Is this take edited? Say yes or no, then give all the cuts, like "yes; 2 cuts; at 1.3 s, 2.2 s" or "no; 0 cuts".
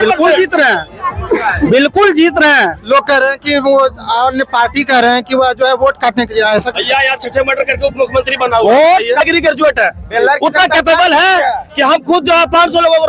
yes; 1 cut; at 9.2 s